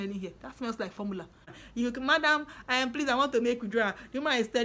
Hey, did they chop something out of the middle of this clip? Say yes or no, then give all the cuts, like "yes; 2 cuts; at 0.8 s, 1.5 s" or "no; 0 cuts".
yes; 1 cut; at 1.6 s